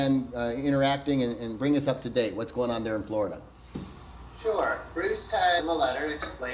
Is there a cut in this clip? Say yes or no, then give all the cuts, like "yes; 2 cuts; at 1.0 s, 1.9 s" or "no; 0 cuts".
no; 0 cuts